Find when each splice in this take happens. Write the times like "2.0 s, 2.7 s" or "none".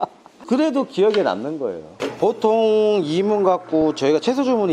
1.9 s